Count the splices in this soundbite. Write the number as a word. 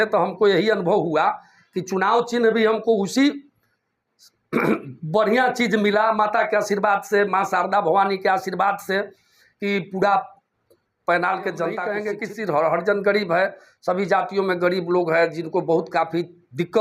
one